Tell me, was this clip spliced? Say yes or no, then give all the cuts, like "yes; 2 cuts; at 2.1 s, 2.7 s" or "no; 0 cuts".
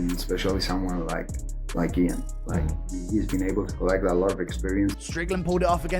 yes; 1 cut; at 5.0 s